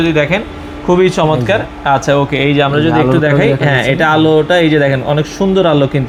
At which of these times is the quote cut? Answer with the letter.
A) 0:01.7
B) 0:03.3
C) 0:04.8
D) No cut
D